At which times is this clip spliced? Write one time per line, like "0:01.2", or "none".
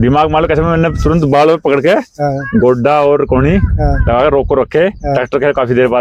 none